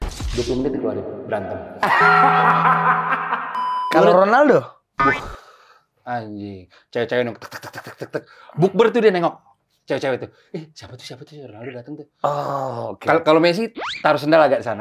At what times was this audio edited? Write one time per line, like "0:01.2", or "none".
0:03.7

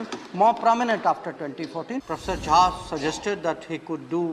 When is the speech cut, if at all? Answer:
0:02.1

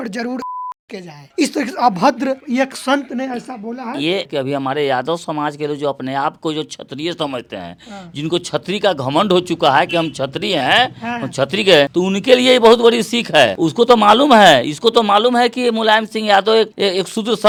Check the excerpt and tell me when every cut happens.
none

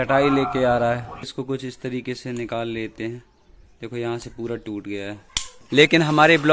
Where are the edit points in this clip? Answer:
0:01.3
0:05.6

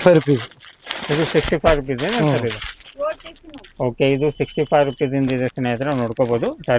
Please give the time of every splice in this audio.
none

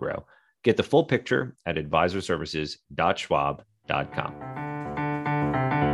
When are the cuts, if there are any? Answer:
0:04.4

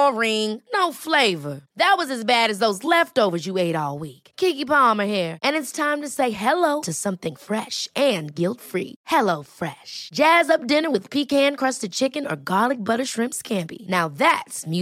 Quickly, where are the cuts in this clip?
none

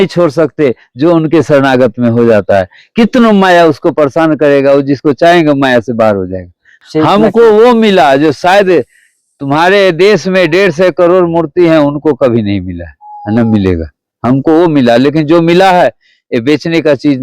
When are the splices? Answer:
0:06.8

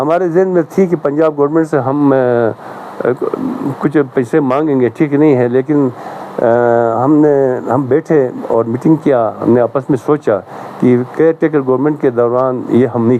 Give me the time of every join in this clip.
none

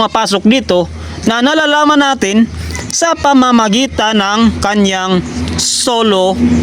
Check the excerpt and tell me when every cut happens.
none

